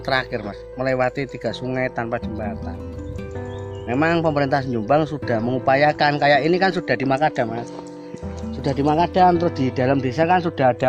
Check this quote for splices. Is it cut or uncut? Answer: uncut